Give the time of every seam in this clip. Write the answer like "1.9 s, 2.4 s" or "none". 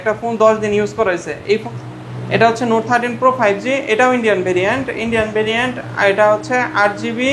1.7 s

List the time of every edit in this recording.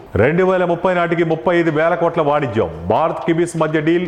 none

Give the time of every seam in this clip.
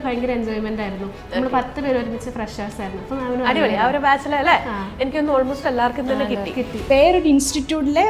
6.8 s

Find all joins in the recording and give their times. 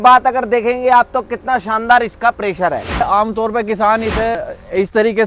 3.0 s, 4.4 s

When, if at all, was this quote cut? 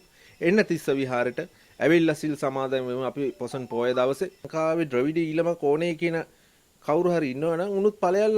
4.5 s

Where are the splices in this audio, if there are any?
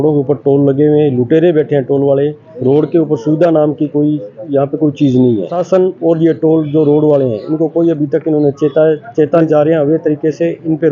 2.4 s, 5.6 s, 9.4 s

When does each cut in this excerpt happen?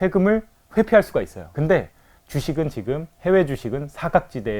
1.4 s

